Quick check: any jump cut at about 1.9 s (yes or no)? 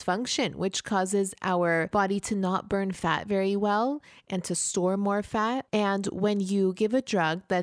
yes